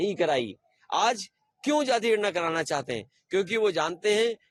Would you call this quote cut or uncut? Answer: uncut